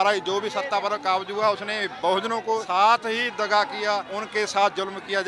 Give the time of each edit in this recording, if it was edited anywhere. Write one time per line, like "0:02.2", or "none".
0:02.6
0:04.2

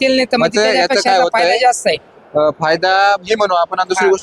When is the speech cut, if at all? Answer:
none

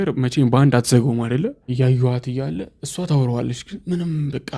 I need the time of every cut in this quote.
0:01.7

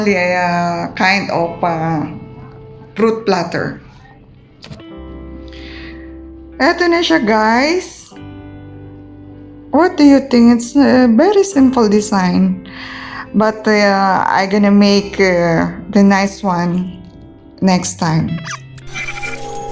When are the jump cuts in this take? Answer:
0:18.6

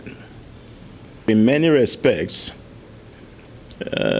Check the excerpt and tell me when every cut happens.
0:01.3

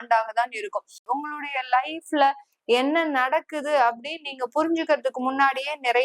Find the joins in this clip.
0:01.0

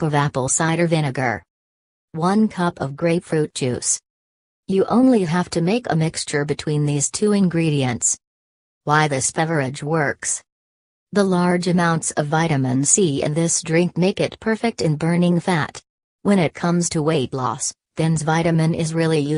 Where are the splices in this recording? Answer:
0:08.7

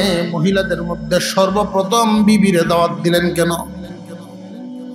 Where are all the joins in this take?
none

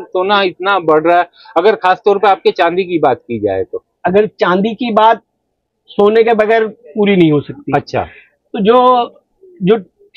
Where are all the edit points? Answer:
none

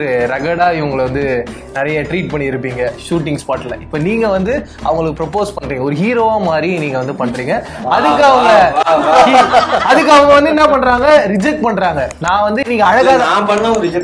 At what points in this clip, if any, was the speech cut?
none

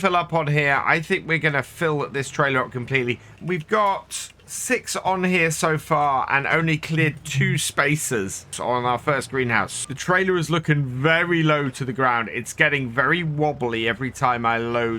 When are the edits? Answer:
0:03.3
0:08.6
0:09.8

